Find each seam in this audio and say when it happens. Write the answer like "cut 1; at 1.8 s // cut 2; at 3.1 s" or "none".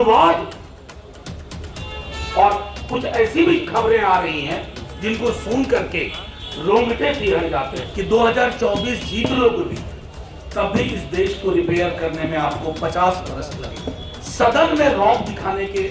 cut 1; at 7.8 s // cut 2; at 14.2 s